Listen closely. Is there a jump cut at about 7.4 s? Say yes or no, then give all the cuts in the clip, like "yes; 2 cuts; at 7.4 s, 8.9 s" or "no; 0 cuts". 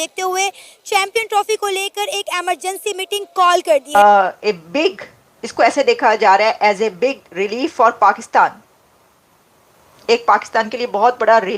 no; 1 cut; at 3.9 s